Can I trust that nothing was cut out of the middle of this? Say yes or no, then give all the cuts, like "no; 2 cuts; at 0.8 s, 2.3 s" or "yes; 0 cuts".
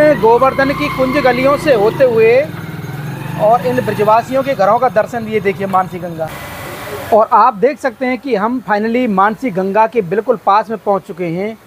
no; 1 cut; at 6.4 s